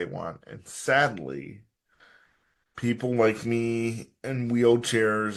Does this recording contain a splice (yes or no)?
no